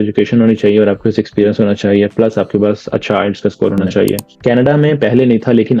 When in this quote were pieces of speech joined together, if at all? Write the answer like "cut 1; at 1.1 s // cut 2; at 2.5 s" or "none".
cut 1; at 4.3 s